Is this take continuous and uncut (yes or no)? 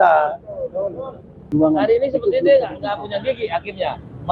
no